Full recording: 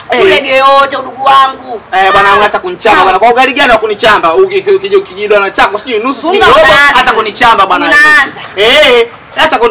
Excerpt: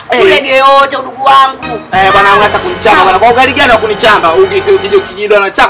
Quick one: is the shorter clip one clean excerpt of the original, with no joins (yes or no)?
yes